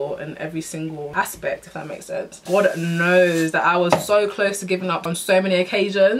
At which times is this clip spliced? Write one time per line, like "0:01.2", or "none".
0:01.1
0:02.4
0:05.1

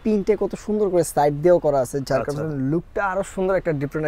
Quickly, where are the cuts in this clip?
none

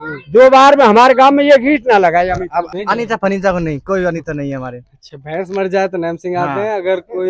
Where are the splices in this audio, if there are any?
0:02.7

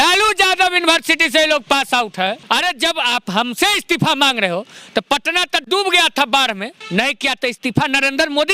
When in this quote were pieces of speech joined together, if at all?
0:02.4
0:06.7

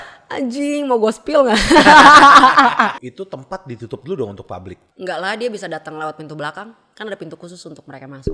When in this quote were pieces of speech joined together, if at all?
0:03.1
0:04.8

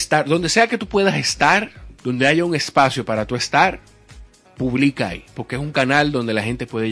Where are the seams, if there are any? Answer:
none

